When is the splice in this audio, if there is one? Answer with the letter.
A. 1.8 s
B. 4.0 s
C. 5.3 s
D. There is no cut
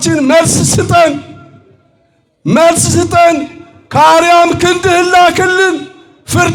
D